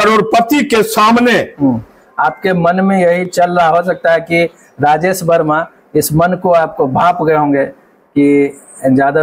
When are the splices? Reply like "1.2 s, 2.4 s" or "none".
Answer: none

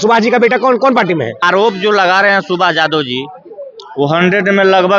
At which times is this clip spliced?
1.4 s

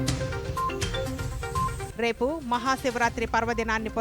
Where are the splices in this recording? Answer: 1.9 s

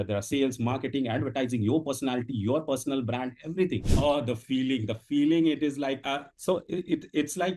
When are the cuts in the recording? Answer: 3.8 s

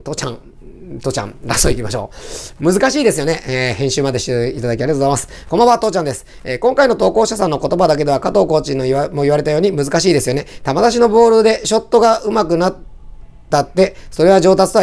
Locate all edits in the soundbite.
none

